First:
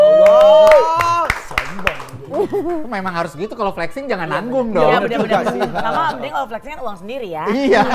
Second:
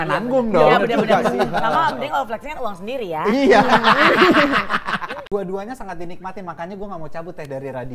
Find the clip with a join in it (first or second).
second